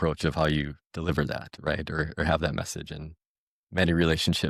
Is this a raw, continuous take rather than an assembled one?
yes; 0 cuts

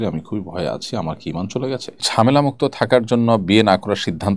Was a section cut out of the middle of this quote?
yes; 1 cut; at 1.9 s

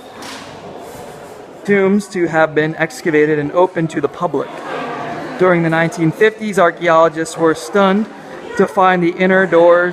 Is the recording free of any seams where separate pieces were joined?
yes; 0 cuts

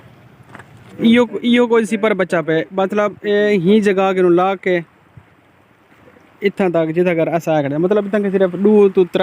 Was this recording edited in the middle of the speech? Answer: yes; 1 cut; at 1.0 s

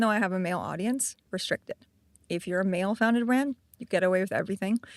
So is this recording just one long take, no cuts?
no; 1 cut; at 1.2 s

